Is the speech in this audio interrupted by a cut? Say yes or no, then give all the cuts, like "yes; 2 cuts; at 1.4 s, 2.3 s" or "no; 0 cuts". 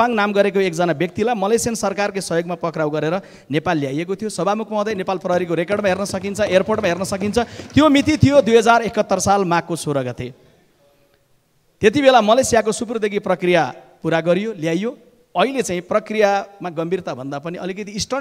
no; 0 cuts